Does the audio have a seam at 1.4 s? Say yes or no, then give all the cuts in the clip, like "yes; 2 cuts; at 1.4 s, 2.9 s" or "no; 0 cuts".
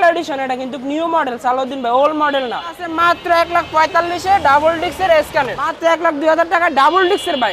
no; 2 cuts; at 2.9 s, 5.6 s